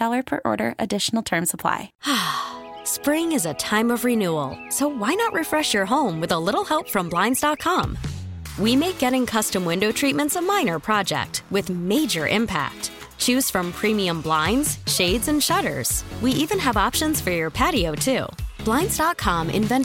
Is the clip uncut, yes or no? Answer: no